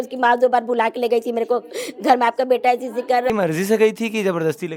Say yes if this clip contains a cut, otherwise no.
yes